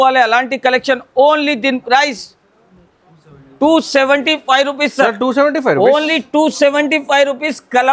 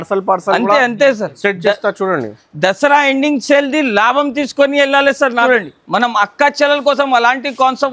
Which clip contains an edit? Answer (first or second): second